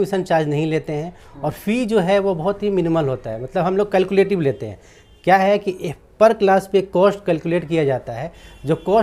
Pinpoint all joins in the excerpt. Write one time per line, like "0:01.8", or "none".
none

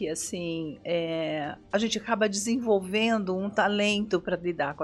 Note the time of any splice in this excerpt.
none

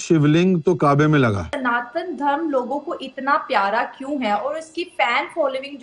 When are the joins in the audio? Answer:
0:01.6

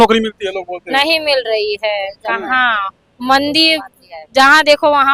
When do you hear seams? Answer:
none

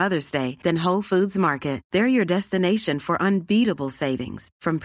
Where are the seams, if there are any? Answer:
none

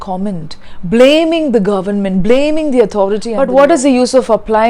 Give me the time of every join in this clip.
0:03.3

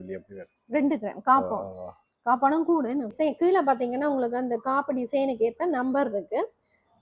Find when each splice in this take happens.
0:03.1

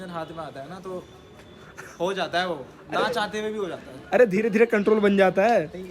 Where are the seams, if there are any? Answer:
none

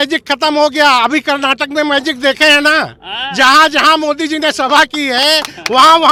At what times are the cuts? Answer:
none

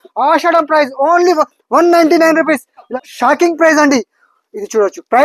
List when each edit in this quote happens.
0:03.0

